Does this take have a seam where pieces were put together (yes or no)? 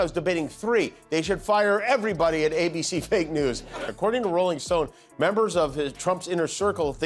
yes